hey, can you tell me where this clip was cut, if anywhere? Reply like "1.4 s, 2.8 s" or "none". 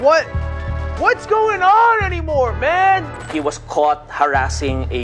3.2 s